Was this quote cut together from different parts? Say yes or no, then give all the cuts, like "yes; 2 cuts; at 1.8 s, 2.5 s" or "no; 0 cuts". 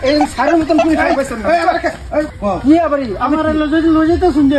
yes; 1 cut; at 2.3 s